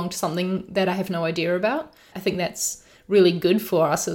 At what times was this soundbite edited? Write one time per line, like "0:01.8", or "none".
0:02.1